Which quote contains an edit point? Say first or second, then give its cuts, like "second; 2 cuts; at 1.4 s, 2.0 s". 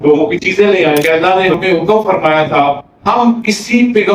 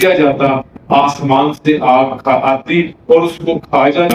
first; 1 cut; at 1.0 s